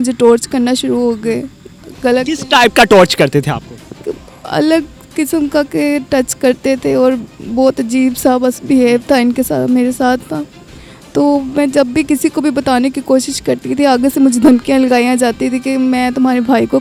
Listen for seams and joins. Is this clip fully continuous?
yes; 0 cuts

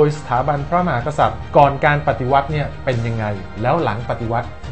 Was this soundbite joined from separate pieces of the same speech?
no; 0 cuts

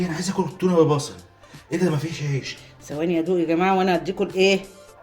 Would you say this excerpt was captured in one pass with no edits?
no; 1 cut; at 2.5 s

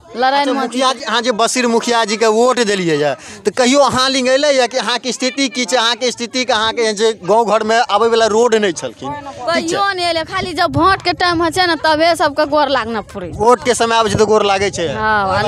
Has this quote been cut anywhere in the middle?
no; 0 cuts

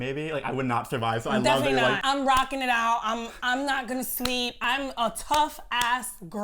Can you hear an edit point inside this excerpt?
yes; 2 cuts; at 2.0 s, 4.6 s

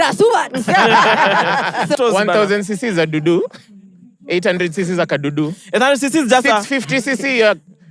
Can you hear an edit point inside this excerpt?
yes; 1 cut; at 2.0 s

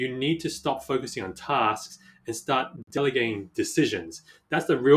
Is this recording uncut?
no; 1 cut; at 3.5 s

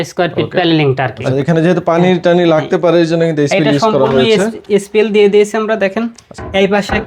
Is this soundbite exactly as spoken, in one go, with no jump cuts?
no; 1 cut; at 1.2 s

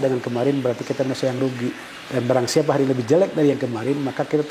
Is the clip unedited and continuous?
no; 1 cut; at 1.9 s

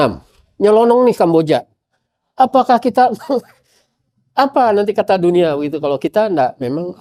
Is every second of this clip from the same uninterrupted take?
yes; 0 cuts

